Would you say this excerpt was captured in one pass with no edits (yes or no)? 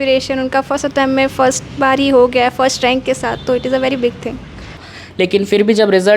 no